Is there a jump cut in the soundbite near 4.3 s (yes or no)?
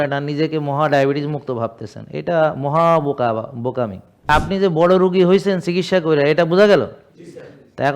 yes